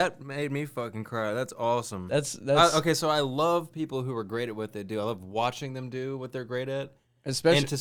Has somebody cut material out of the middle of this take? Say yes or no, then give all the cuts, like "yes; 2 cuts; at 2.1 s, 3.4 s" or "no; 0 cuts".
no; 0 cuts